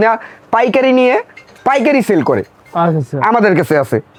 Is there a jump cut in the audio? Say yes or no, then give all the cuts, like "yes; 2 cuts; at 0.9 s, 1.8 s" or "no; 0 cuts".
no; 0 cuts